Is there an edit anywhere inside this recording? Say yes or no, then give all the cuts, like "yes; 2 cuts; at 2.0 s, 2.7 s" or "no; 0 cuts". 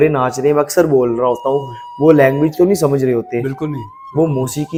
no; 0 cuts